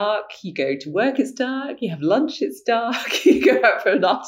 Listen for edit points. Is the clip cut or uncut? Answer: uncut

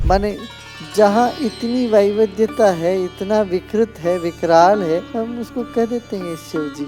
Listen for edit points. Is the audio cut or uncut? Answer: cut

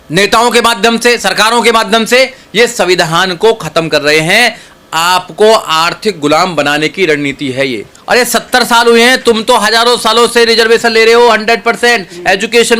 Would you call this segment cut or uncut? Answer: cut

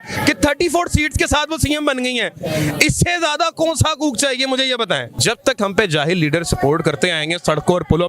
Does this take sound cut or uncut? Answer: cut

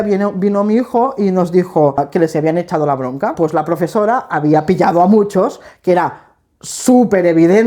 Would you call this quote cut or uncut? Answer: cut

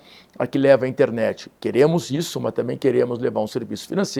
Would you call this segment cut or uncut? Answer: uncut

